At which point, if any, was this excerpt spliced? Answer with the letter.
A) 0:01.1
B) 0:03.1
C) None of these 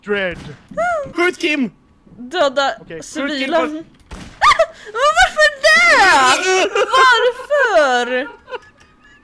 C